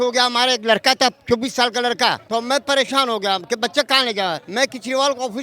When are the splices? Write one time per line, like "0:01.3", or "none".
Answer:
0:02.2
0:04.4